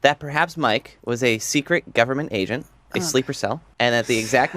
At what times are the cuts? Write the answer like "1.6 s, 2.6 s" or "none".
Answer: 0.9 s, 3.7 s